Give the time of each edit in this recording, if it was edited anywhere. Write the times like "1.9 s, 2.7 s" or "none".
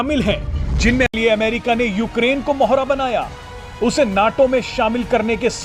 1.1 s